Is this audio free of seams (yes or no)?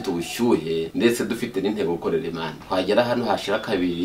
no